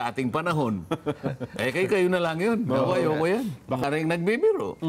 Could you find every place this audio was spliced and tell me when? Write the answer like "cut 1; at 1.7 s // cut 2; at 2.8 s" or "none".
cut 1; at 3.8 s